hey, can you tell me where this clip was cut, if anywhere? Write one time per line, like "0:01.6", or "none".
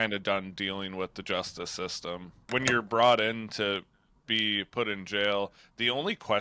0:02.4